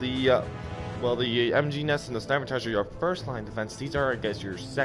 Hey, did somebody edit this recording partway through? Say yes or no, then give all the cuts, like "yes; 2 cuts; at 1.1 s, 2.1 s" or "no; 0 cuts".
yes; 1 cut; at 3.3 s